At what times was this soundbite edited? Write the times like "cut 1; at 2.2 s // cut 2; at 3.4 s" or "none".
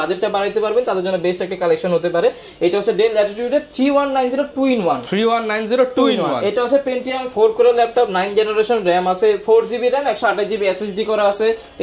none